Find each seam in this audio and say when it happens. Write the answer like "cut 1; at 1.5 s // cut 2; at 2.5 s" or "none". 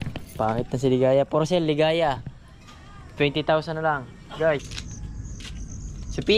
cut 1; at 4.6 s